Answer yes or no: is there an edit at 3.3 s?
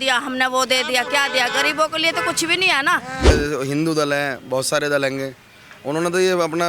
yes